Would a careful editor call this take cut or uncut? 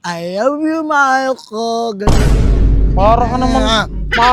uncut